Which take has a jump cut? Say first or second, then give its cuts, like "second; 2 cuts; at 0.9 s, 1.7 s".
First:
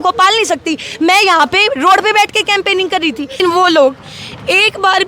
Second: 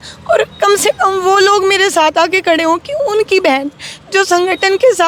first; 1 cut; at 3.4 s